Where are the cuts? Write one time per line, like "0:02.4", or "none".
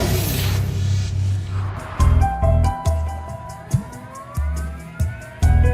0:02.5